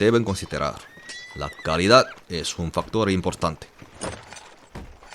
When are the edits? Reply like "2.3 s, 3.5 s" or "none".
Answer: 3.8 s